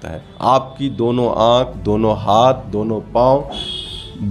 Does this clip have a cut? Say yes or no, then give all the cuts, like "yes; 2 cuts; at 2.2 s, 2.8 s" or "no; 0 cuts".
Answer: no; 0 cuts